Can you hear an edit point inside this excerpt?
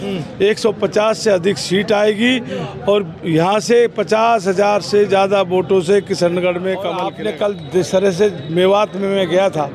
yes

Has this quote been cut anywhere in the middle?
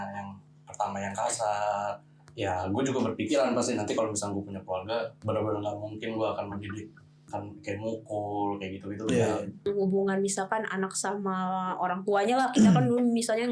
yes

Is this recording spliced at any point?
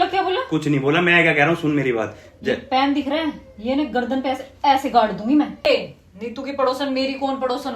yes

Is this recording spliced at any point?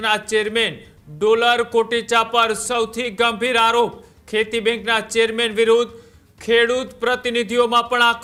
no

